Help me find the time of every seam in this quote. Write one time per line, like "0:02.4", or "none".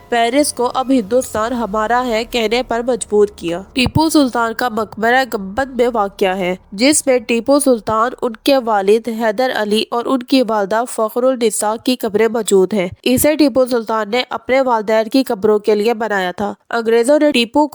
none